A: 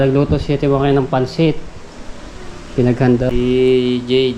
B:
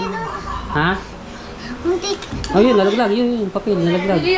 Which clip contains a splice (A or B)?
A